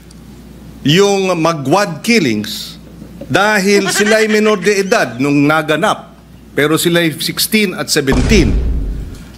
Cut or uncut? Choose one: cut